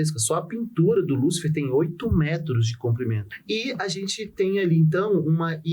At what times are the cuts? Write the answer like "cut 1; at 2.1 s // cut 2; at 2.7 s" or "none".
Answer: cut 1; at 3.2 s